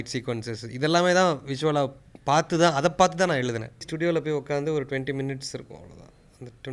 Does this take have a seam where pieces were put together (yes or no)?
yes